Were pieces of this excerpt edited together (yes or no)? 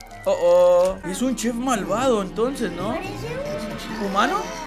yes